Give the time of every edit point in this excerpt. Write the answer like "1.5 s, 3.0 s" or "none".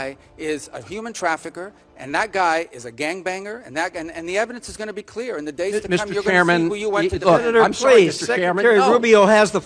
none